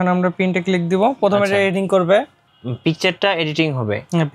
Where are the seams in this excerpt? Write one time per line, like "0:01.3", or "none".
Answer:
none